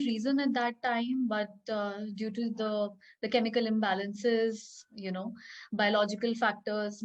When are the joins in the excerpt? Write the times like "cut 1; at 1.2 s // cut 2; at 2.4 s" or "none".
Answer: none